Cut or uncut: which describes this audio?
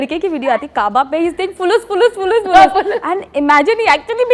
uncut